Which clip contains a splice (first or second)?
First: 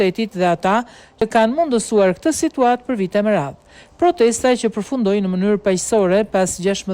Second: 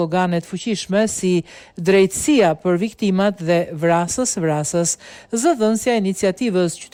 first